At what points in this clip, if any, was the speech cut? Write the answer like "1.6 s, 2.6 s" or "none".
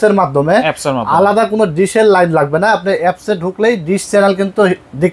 none